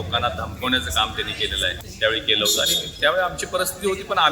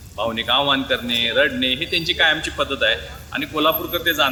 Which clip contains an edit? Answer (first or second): first